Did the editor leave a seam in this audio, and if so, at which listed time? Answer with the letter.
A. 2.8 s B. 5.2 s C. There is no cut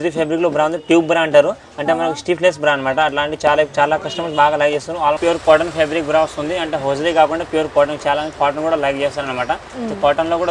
B